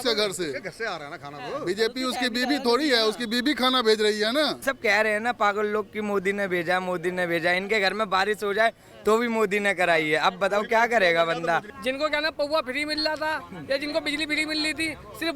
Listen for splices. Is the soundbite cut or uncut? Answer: cut